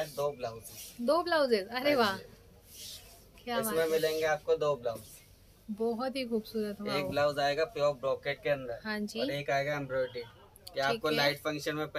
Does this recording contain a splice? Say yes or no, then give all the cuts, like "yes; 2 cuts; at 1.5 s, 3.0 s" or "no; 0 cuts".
no; 0 cuts